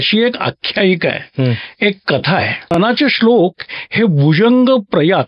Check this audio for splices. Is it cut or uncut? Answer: cut